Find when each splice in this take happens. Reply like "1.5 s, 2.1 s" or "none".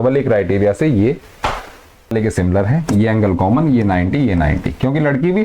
2.1 s